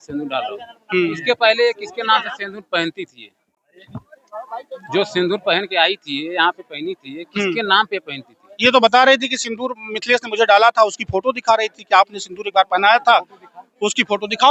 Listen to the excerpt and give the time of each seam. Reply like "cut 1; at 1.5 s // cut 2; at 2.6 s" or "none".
none